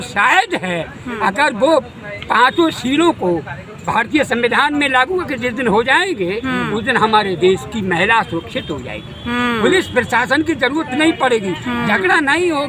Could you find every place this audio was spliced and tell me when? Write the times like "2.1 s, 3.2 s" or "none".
none